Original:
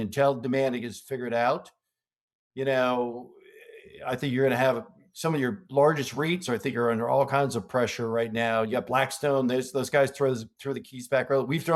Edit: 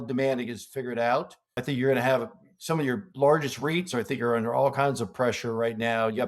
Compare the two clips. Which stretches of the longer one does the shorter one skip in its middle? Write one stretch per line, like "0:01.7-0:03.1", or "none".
0:01.8-0:04.0